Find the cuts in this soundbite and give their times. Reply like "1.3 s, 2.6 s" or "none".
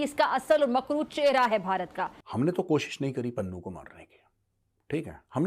2.3 s